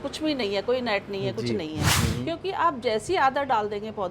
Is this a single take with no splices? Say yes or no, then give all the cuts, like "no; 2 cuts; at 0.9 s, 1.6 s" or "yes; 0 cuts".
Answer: no; 1 cut; at 1.9 s